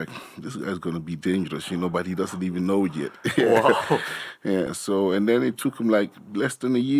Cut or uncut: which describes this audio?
uncut